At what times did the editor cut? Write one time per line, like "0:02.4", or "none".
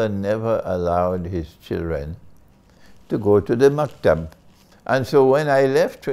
0:04.7